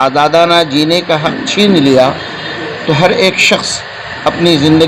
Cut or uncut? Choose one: uncut